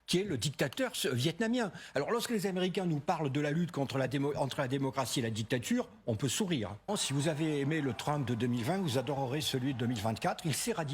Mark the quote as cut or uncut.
cut